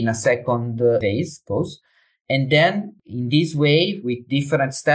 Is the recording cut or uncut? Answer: cut